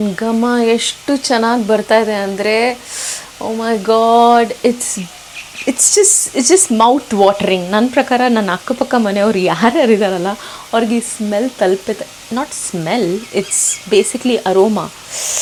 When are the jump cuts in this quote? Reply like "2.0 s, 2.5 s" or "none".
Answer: none

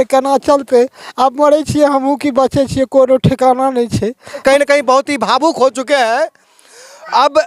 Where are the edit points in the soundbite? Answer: 4.4 s

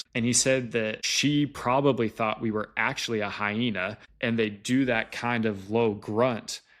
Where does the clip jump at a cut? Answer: 1.0 s, 4.0 s

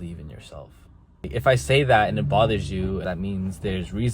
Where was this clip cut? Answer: 1.3 s, 3.0 s

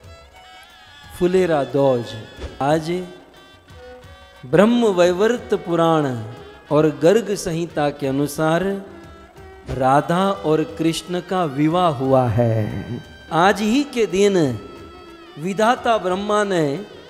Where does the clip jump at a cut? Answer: 2.6 s, 13.2 s

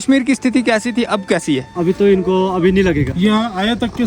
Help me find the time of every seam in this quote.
1.7 s, 3.1 s

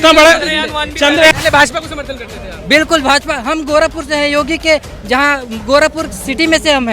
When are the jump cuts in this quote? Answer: 1.3 s

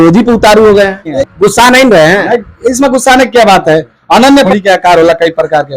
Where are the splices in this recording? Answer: 1.2 s, 4.5 s

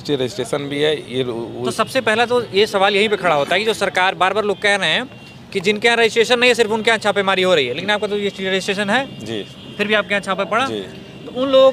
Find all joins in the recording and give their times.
none

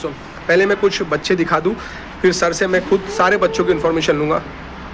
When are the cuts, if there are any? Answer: none

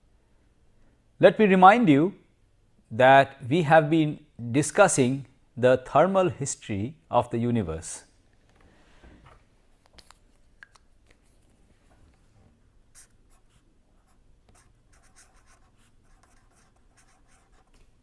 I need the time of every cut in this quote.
none

